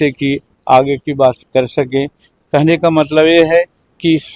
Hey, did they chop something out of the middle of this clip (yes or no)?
no